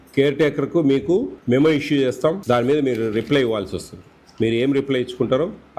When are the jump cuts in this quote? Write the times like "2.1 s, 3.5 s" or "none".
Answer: 1.4 s, 2.4 s